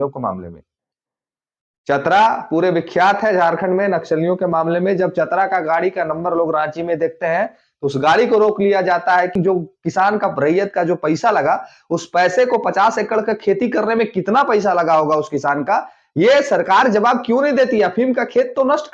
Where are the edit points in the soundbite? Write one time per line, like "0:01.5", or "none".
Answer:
0:09.3